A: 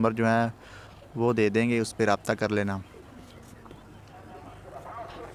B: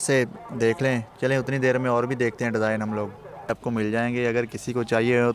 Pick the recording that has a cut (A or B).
B